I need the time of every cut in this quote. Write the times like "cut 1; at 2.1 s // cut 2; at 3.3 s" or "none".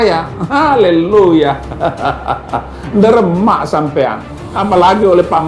none